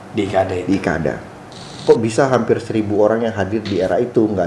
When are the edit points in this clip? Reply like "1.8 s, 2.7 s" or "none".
1.8 s

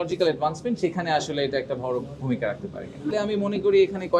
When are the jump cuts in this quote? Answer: 3.2 s

